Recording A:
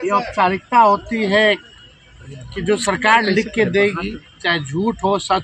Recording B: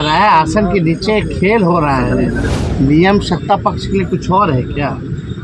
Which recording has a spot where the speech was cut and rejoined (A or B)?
B